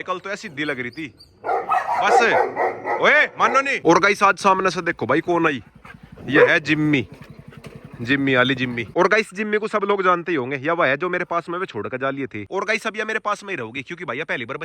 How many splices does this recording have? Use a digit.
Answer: 3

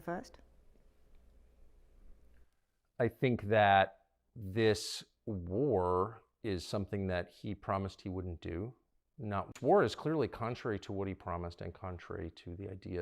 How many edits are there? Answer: 1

